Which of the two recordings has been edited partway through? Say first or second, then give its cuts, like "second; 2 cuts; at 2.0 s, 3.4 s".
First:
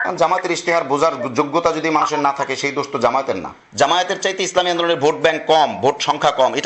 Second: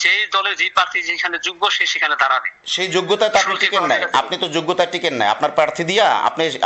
first; 1 cut; at 3.5 s